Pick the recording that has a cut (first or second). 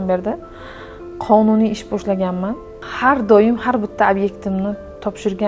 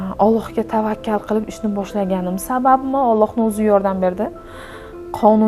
first